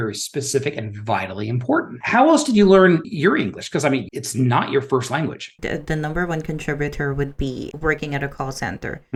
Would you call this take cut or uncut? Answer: uncut